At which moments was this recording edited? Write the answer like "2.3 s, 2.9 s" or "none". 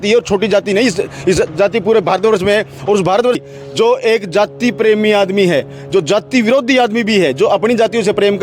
3.4 s

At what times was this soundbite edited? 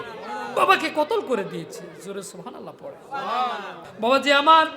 3.8 s

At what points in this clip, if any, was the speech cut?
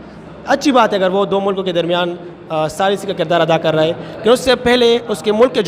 none

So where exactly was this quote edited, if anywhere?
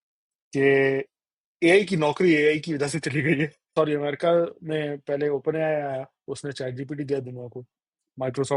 3.6 s

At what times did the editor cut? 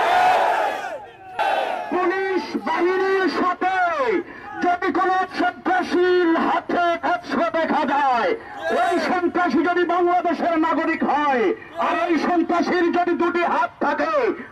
1.4 s

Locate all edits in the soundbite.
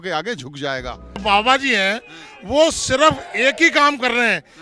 1.2 s

